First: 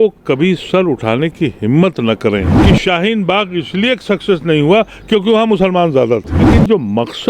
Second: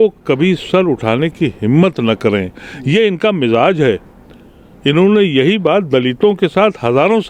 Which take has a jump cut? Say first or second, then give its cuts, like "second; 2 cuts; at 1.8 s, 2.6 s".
first; 2 cuts; at 2.5 s, 6.5 s